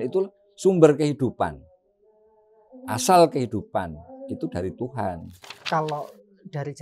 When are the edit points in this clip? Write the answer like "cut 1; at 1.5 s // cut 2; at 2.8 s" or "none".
cut 1; at 5.6 s